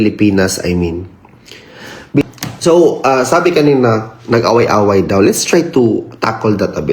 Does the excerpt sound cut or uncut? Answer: cut